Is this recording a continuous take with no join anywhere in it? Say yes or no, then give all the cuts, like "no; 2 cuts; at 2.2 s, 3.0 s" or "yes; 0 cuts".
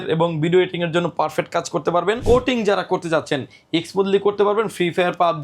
no; 1 cut; at 2.2 s